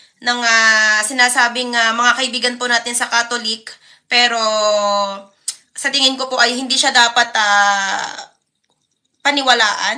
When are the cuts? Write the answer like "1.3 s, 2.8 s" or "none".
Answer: none